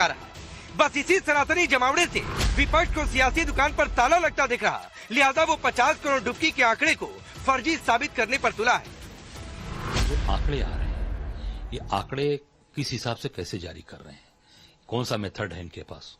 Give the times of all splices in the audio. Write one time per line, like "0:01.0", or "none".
0:01.9